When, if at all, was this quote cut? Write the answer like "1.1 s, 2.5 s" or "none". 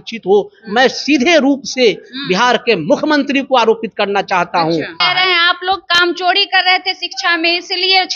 5.0 s